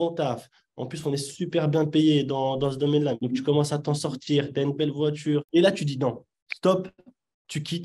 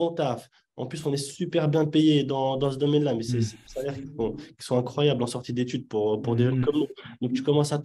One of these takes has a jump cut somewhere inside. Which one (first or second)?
first